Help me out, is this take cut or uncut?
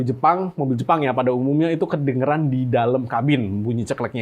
uncut